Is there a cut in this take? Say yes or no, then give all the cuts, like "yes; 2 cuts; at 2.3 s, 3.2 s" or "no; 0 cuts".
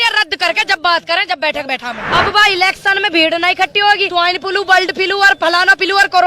yes; 2 cuts; at 2.0 s, 4.1 s